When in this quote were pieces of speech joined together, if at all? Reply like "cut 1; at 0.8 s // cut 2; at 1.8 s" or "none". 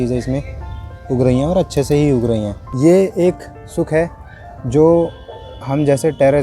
cut 1; at 2.6 s